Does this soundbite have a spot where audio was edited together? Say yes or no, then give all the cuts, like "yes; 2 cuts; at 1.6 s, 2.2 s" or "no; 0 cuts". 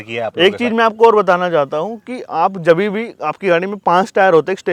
no; 0 cuts